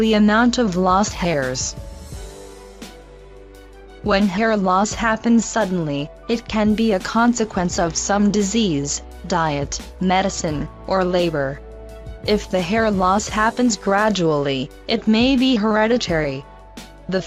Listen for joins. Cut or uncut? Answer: uncut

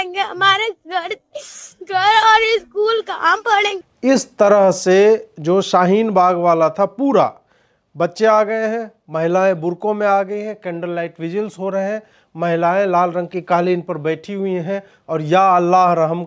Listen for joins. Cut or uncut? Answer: uncut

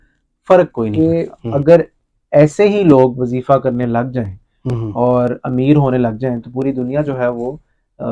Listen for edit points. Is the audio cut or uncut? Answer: cut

